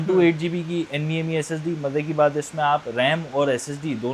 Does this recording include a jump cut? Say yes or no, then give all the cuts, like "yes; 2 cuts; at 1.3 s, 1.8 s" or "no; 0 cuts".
no; 0 cuts